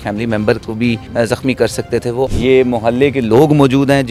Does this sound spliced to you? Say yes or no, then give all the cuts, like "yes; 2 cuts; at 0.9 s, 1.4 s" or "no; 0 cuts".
yes; 2 cuts; at 1.0 s, 2.3 s